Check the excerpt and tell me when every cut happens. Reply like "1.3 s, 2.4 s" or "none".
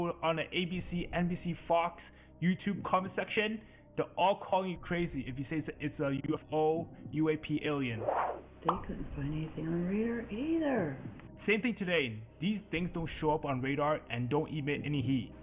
none